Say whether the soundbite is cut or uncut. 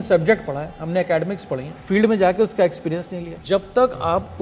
cut